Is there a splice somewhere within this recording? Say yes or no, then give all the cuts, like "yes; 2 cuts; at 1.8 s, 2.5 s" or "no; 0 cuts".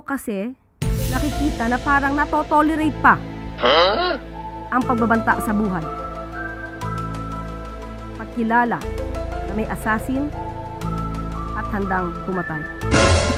no; 0 cuts